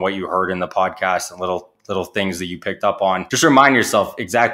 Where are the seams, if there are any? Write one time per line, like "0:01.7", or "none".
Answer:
0:03.3